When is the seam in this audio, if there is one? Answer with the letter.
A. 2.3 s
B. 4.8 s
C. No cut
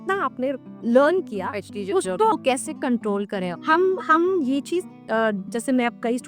A